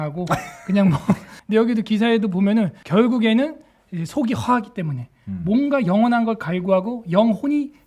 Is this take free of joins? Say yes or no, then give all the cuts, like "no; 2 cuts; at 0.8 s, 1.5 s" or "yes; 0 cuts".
no; 2 cuts; at 1.3 s, 2.8 s